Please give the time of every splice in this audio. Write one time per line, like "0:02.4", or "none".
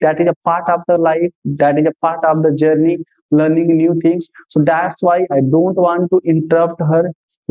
none